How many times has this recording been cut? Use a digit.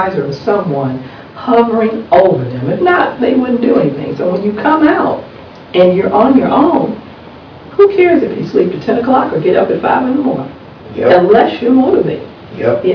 0